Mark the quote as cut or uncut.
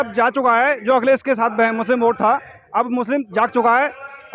uncut